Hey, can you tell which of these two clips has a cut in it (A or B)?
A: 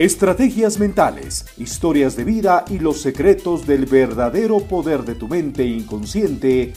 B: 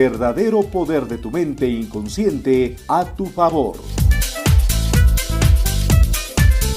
B